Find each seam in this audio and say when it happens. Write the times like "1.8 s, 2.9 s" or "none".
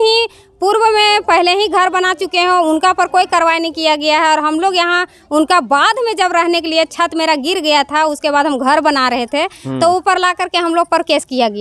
none